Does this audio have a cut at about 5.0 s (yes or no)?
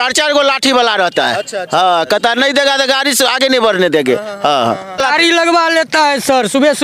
yes